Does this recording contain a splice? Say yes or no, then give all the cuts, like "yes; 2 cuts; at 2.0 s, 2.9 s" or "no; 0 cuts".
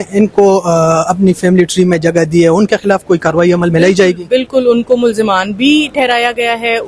no; 0 cuts